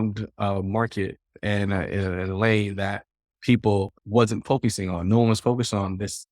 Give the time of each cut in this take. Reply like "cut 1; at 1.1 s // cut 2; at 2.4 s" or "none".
cut 1; at 4.0 s

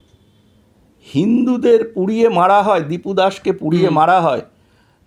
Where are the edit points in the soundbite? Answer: none

